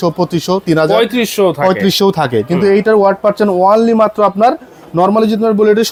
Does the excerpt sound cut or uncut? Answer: uncut